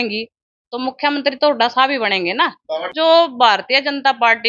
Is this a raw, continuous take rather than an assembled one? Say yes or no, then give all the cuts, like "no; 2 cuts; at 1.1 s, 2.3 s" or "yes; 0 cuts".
no; 1 cut; at 2.9 s